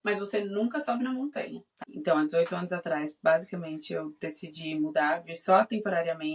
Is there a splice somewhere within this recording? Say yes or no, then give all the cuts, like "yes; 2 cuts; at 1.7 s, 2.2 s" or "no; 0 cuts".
yes; 1 cut; at 1.6 s